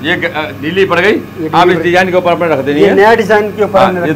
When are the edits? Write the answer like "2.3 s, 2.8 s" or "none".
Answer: none